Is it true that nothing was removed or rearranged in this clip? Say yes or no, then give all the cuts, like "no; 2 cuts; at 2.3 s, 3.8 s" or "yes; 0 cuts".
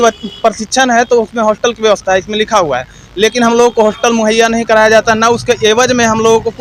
yes; 0 cuts